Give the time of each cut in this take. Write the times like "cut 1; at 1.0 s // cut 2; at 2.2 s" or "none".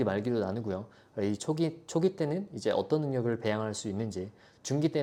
none